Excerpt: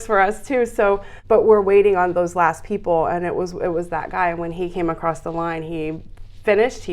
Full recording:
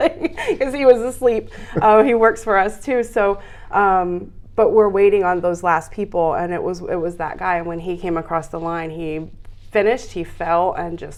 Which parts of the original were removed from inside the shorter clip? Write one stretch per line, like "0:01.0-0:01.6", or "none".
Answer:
0:03.5-0:04.4